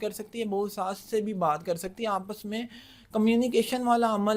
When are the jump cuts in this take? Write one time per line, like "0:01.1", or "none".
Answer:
none

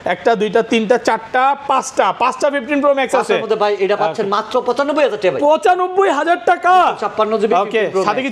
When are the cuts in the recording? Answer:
none

